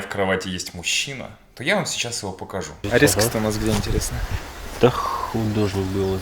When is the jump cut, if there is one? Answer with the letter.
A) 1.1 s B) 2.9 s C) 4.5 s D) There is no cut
B